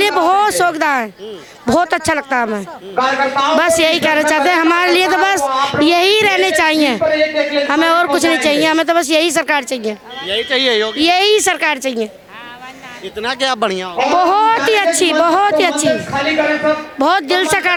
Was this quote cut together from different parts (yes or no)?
no